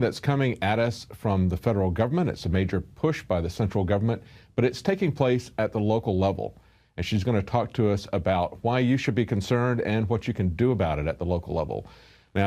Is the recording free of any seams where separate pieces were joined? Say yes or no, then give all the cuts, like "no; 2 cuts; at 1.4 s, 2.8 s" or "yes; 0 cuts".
no; 1 cut; at 10.8 s